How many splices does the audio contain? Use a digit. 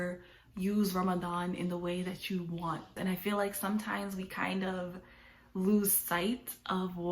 1